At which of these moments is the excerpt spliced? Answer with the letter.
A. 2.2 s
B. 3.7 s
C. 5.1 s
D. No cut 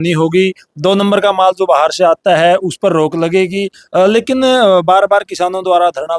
D